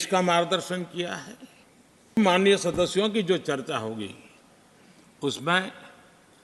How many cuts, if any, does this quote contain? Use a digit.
1